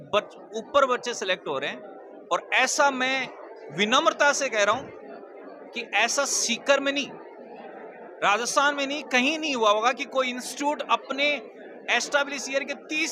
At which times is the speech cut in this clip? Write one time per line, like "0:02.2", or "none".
none